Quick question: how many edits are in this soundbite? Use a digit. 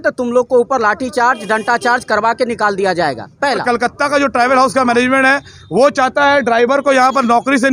1